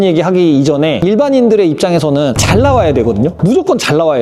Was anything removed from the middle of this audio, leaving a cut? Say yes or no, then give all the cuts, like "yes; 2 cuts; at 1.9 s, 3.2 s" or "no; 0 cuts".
no; 0 cuts